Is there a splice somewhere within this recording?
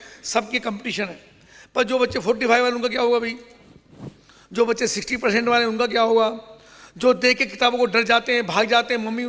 no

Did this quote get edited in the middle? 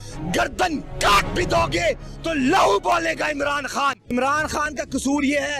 yes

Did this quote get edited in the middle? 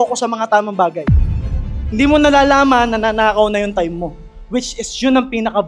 no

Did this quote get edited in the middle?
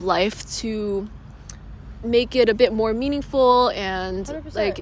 no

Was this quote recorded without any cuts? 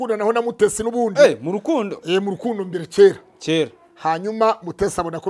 yes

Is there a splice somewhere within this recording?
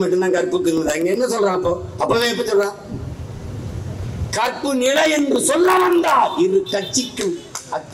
no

